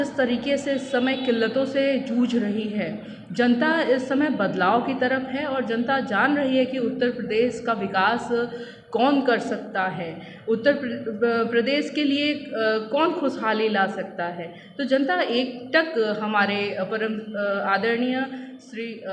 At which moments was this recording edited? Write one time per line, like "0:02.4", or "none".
none